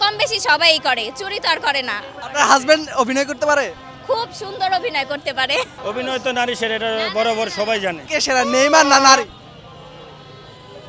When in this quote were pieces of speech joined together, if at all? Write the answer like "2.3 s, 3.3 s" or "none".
2.1 s, 5.7 s, 8.0 s